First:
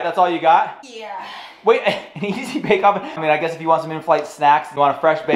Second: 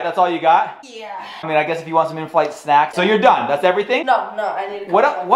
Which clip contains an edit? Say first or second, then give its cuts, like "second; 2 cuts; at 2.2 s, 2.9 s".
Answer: second; 3 cuts; at 1.4 s, 2.9 s, 4.0 s